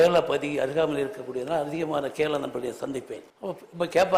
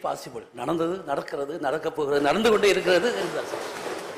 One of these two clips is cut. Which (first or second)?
first